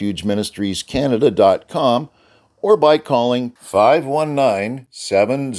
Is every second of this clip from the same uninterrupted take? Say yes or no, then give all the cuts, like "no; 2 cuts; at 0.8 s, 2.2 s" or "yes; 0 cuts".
yes; 0 cuts